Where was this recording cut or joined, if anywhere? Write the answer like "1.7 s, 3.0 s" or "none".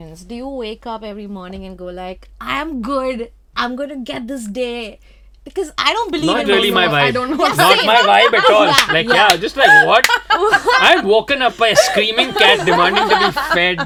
none